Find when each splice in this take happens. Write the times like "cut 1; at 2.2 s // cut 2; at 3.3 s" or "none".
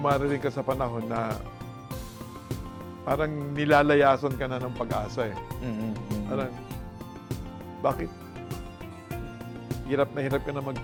none